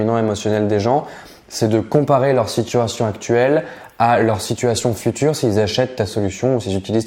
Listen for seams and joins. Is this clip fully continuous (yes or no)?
yes